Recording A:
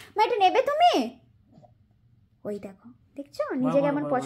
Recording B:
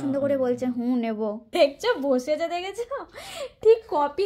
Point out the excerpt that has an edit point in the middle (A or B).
B